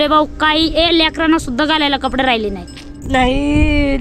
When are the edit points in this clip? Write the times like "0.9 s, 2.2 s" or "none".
3.1 s